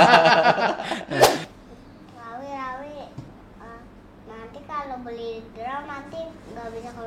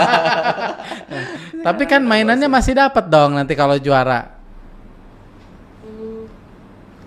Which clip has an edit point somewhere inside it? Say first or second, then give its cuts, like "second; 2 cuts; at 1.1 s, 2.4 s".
first; 1 cut; at 1.4 s